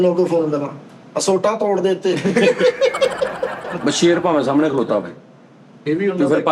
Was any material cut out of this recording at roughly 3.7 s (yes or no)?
yes